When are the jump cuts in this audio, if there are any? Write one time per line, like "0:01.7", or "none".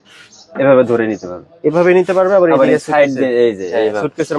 none